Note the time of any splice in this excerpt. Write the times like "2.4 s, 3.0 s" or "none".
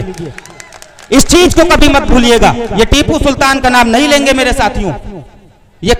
none

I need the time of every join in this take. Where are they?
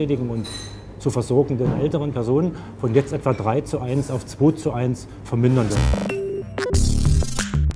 5.9 s

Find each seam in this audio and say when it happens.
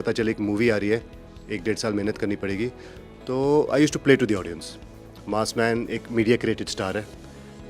none

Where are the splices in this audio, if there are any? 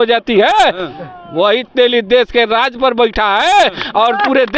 none

